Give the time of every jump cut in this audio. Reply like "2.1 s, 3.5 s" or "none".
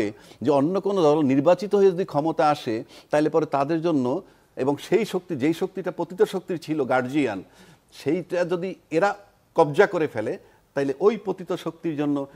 none